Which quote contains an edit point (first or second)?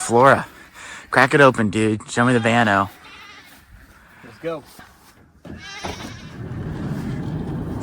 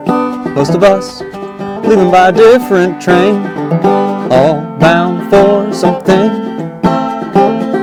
first